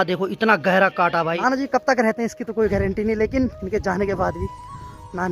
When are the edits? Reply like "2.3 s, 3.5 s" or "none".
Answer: 1.3 s, 3.6 s

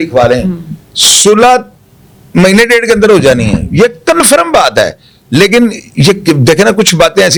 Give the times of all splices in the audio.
none

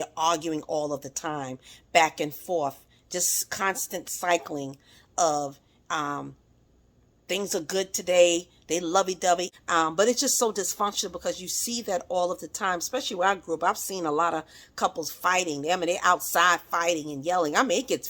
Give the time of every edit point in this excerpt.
9.5 s

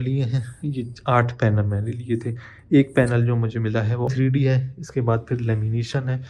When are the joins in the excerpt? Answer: 4.1 s

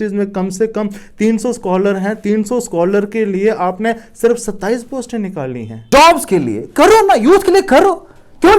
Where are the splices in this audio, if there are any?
5.8 s

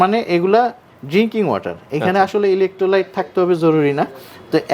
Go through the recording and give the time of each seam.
none

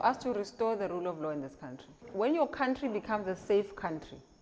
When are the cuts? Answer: 2.1 s

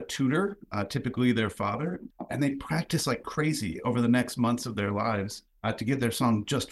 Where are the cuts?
2.1 s, 5.4 s

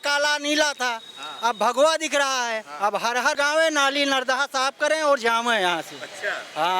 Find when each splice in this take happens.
3.4 s

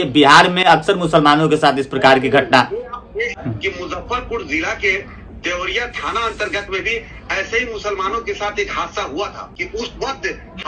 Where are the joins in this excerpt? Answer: 3.4 s, 9.5 s

